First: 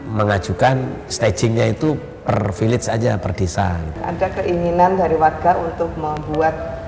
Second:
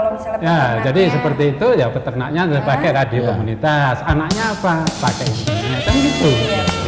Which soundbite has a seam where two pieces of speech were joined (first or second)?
first